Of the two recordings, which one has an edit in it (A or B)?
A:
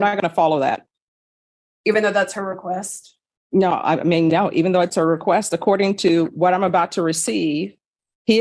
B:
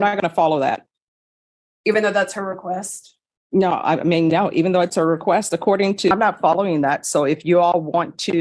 B